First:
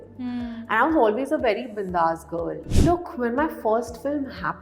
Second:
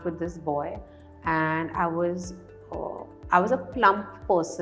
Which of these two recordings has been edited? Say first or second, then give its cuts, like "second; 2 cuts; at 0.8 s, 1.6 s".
first; 1 cut; at 2.6 s